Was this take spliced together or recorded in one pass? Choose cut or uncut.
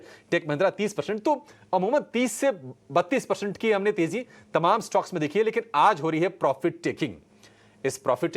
uncut